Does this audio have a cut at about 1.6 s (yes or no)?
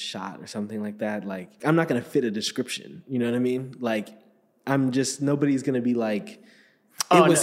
yes